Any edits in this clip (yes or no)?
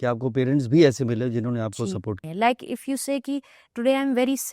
yes